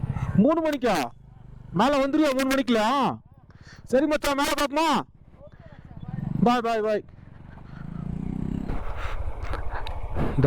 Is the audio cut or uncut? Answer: cut